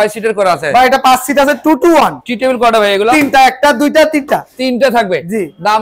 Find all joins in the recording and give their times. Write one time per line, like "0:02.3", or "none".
none